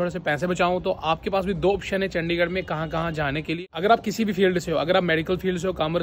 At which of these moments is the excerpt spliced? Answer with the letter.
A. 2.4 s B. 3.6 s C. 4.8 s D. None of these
B